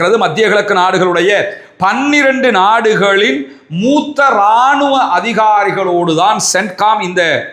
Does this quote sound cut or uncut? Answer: uncut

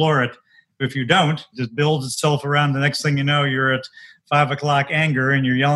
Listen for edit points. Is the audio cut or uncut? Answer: cut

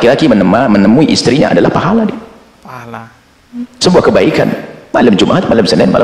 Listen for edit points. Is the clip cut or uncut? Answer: uncut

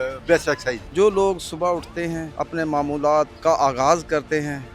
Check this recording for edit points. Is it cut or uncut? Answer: cut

